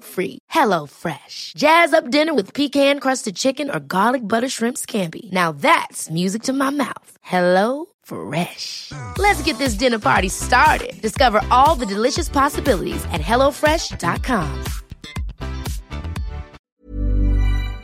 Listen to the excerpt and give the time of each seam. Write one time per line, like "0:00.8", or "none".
0:16.6